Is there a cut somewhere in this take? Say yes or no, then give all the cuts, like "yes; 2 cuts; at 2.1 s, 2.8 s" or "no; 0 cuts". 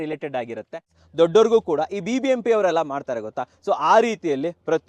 yes; 1 cut; at 0.9 s